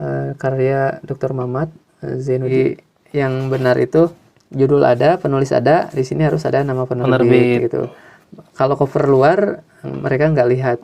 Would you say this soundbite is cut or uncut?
cut